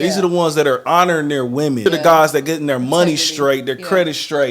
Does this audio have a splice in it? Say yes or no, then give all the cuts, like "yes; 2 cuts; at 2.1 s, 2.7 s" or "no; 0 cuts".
yes; 1 cut; at 1.8 s